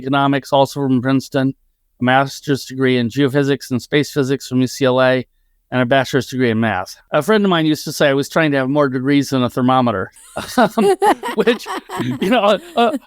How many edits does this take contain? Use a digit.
1